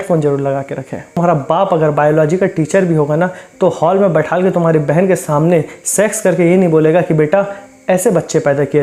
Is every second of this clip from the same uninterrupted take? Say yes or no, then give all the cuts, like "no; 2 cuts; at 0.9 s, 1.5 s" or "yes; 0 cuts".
no; 1 cut; at 1.1 s